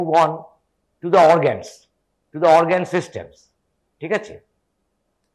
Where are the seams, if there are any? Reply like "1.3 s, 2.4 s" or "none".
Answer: none